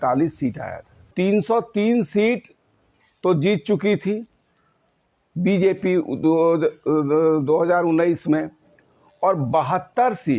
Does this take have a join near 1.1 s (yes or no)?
yes